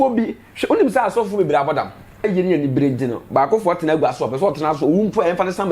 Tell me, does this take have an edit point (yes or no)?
yes